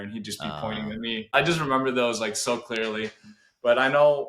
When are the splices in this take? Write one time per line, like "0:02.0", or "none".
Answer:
0:01.3

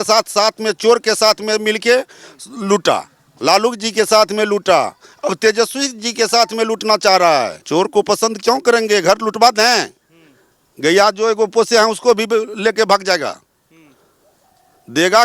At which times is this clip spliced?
0:07.6

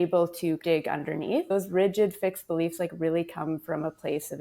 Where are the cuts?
0:01.5

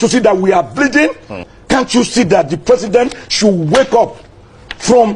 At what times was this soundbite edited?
0:01.5

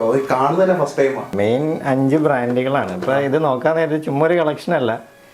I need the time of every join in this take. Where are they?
0:01.3

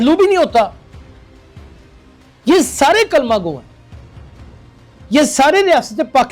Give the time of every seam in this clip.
0:00.7
0:02.2

